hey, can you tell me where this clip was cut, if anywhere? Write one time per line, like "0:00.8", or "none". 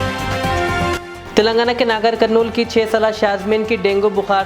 0:00.9

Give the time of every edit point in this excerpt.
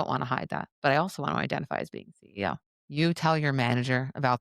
0:02.7

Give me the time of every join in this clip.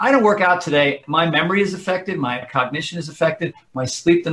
0:01.0
0:02.5

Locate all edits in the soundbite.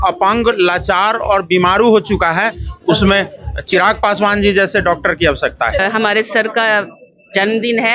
0:05.8

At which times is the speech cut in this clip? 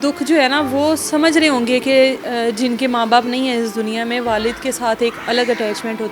none

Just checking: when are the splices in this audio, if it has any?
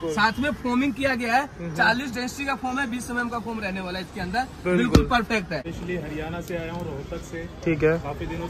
0:05.7

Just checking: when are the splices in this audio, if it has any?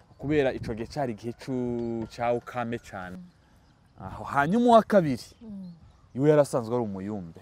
0:03.2

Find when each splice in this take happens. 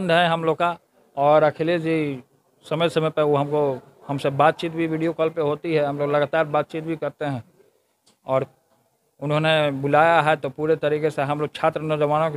none

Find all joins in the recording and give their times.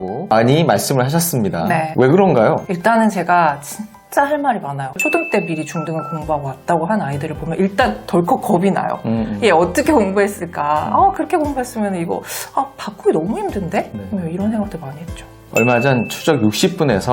0:02.7
0:04.9

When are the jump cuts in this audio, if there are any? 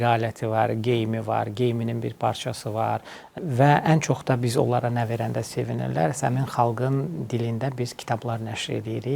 0:03.3

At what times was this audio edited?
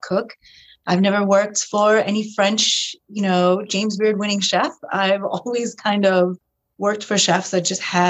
none

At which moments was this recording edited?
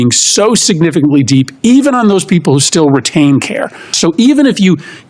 0:03.9

